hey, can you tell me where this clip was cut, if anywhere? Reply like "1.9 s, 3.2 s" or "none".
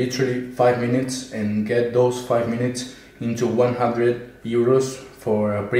none